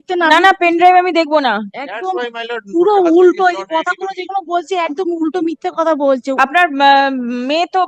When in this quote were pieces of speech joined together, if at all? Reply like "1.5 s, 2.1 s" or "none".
none